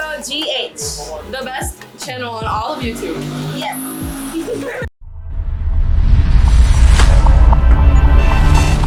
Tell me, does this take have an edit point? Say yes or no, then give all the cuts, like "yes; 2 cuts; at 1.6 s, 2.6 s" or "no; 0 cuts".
no; 0 cuts